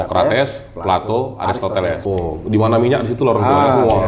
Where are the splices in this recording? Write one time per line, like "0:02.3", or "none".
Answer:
0:02.0